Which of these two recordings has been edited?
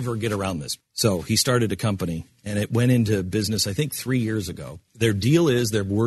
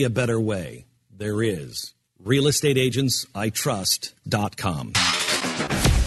second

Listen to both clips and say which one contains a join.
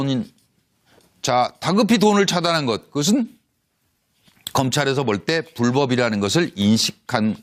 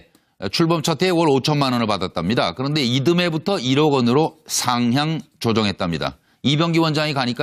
second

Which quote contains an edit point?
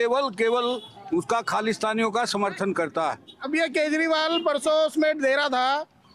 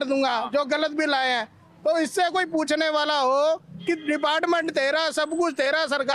first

